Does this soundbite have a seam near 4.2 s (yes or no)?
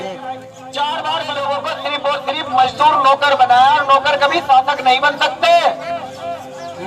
no